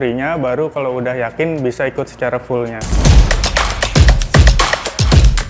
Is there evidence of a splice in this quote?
yes; 1 cut; at 2.8 s

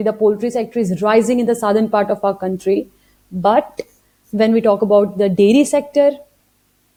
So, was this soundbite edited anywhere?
no; 0 cuts

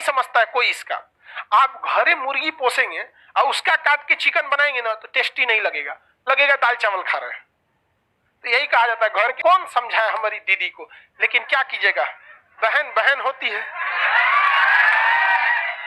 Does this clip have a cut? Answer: yes; 1 cut; at 9.3 s

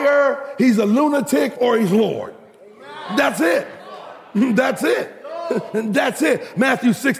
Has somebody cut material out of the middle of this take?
no; 0 cuts

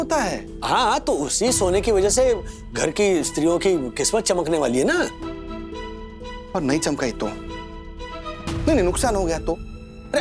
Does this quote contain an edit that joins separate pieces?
no; 0 cuts

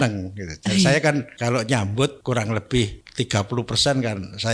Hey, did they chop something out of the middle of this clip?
yes; 3 cuts; at 1.3 s, 2.2 s, 3.0 s

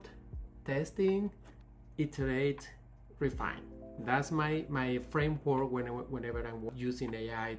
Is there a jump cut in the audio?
yes; 1 cut; at 6.7 s

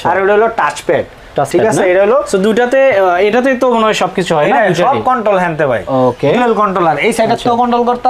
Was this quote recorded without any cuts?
yes; 0 cuts

